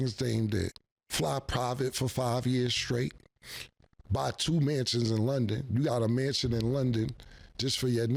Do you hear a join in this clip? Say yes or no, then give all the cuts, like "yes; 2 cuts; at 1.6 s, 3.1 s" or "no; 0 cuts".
no; 0 cuts